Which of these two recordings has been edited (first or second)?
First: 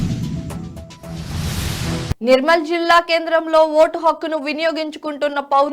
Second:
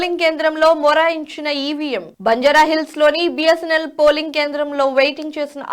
first